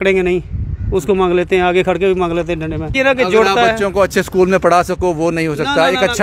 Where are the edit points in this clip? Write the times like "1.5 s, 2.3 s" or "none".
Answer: 2.9 s